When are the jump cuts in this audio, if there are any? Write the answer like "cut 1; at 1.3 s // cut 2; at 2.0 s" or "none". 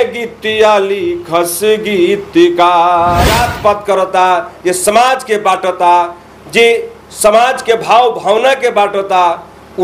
cut 1; at 3.5 s